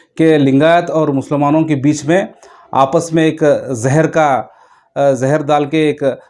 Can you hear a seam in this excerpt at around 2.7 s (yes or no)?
no